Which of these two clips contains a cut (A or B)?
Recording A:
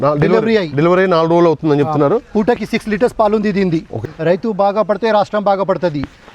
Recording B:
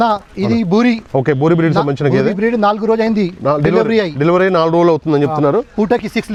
A